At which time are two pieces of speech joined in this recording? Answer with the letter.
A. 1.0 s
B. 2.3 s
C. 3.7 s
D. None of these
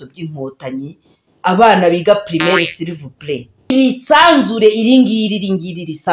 C